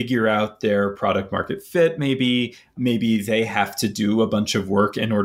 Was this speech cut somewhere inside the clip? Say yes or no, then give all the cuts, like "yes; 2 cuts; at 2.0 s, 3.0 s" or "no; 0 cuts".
yes; 1 cut; at 2.7 s